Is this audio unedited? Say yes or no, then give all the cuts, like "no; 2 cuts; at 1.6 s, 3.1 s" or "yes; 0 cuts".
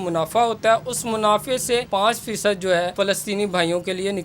no; 2 cuts; at 1.9 s, 2.9 s